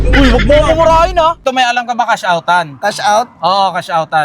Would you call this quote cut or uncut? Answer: cut